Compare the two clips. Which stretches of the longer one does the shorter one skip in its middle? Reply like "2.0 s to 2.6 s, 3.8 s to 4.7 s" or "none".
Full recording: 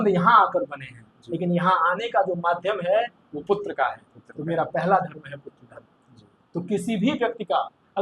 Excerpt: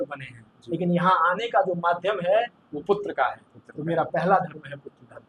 none